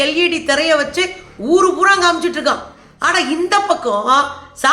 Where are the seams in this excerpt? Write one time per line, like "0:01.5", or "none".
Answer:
0:02.8